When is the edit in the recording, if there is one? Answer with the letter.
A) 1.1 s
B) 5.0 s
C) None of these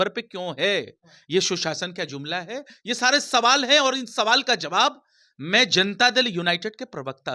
C